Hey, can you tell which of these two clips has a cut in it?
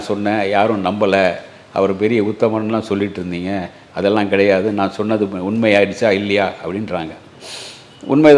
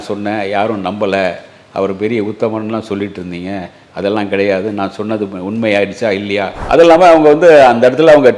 second; 1 cut; at 6.6 s

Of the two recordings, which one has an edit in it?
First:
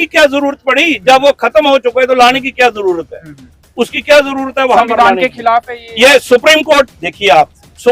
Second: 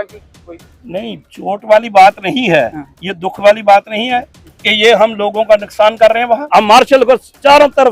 second; 1 cut; at 6.4 s

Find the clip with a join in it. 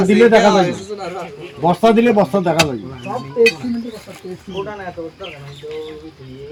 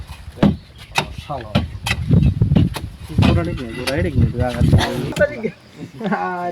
second; 1 cut; at 5.2 s

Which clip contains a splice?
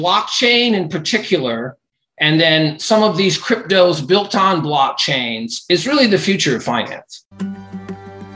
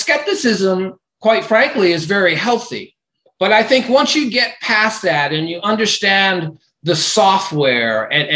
first; 1 cut; at 7.2 s

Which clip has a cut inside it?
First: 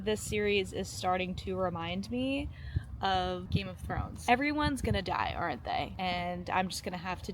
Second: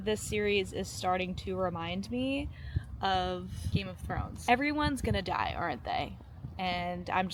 first; 2 cuts; at 3.4 s, 5.9 s

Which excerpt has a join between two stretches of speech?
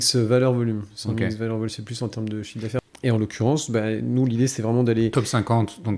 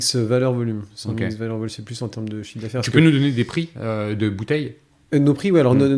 first; 1 cut; at 2.8 s

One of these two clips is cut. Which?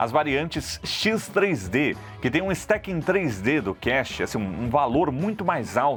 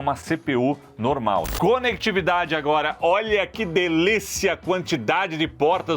second; 1 cut; at 1.5 s

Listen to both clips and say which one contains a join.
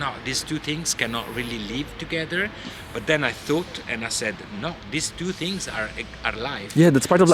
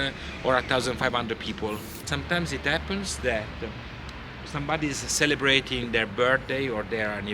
second; 1 cut; at 2.0 s

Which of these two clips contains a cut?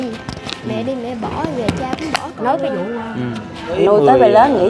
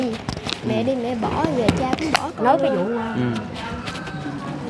first; 1 cut; at 3.8 s

